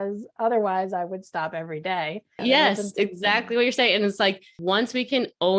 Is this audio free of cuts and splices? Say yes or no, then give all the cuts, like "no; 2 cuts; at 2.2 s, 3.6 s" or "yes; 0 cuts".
no; 2 cuts; at 2.4 s, 4.5 s